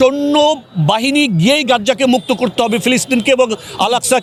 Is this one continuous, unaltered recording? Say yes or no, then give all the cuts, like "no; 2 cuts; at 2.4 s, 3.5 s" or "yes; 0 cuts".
yes; 0 cuts